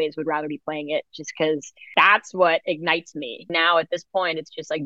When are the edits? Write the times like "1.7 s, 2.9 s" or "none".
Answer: 1.8 s, 3.5 s

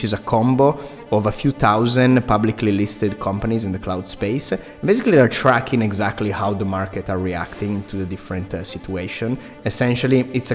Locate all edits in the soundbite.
9.5 s

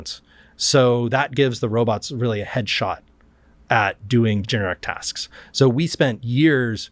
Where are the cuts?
4.5 s

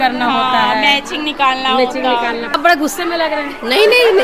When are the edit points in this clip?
2.6 s

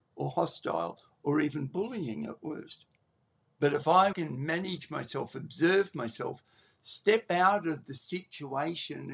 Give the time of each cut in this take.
4.1 s

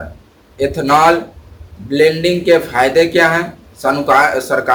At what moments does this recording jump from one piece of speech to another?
none

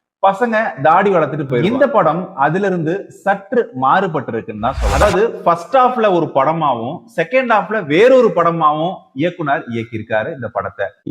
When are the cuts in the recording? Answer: 1.7 s, 5.0 s

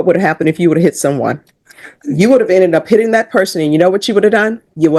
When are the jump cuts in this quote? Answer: none

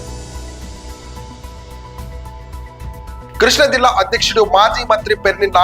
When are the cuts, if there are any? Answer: none

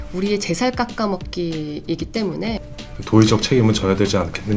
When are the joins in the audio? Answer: 2.6 s

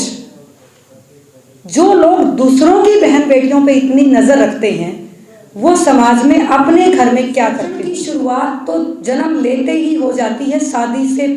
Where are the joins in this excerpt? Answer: 7.8 s

